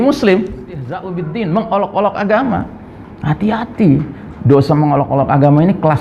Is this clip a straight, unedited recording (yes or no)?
no